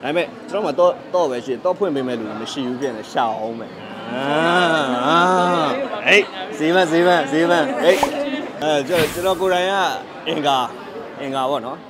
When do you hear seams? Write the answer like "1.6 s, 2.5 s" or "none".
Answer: 8.5 s

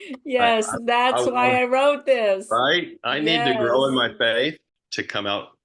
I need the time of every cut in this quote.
none

